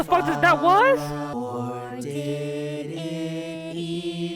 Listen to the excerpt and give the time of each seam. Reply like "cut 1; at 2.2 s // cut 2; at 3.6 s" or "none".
cut 1; at 1.3 s

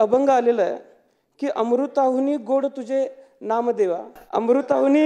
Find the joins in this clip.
cut 1; at 4.1 s

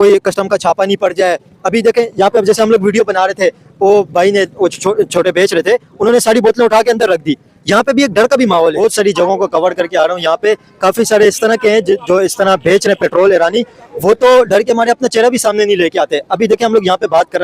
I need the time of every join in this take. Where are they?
cut 1; at 8.8 s

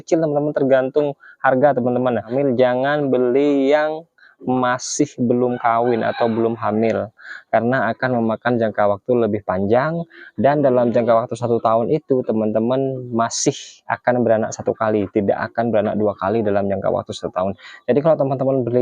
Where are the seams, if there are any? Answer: cut 1; at 2.3 s

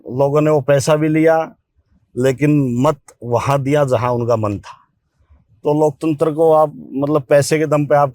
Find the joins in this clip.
none

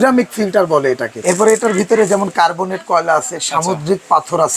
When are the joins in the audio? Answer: cut 1; at 1.1 s

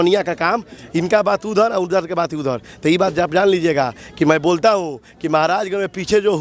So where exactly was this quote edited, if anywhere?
none

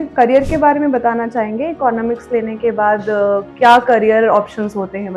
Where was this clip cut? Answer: none

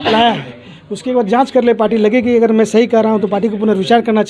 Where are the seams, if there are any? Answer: none

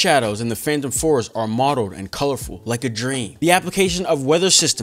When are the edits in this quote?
none

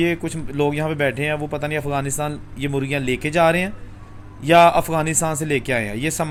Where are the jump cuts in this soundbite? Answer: none

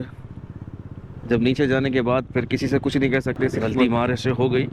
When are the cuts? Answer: cut 1; at 3.7 s

